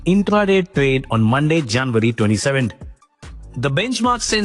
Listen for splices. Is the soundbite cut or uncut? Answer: uncut